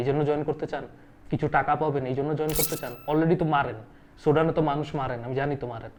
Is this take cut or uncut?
uncut